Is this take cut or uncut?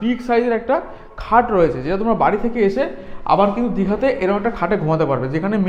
uncut